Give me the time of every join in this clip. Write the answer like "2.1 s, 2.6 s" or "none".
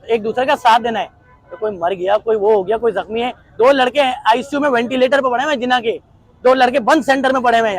none